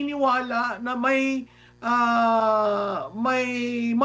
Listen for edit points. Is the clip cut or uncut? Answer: uncut